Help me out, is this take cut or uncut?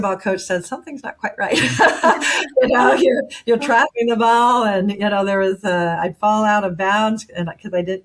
uncut